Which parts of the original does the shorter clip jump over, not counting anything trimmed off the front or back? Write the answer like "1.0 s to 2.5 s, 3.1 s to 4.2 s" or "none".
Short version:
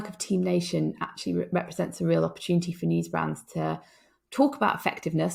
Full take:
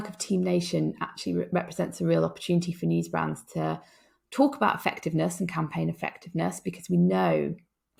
none